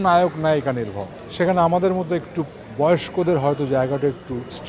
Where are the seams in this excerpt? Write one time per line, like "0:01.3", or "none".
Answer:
none